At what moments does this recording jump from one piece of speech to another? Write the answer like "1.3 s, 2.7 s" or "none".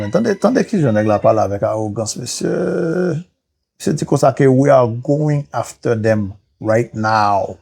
none

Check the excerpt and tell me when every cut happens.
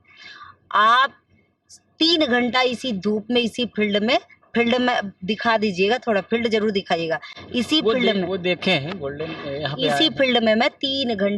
none

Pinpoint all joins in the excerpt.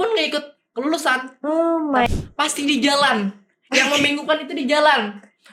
2.1 s

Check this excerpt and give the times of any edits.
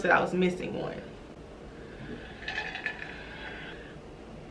none

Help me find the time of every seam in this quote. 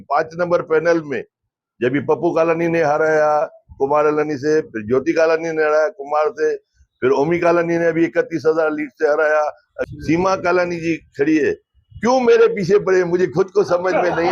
9.6 s

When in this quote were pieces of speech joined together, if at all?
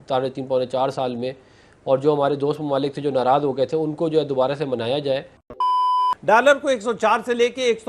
5.5 s, 6.2 s

